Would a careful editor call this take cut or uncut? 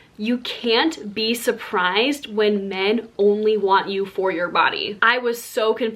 cut